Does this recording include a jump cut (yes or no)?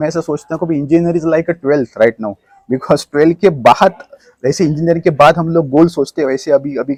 no